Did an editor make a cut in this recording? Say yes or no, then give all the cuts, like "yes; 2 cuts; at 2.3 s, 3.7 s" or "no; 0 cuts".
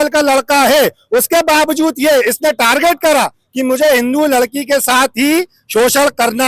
no; 0 cuts